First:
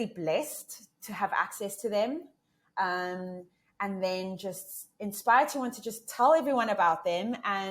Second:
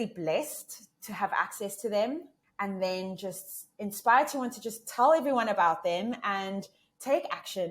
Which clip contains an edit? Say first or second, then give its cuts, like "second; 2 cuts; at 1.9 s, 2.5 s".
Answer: second; 1 cut; at 2.4 s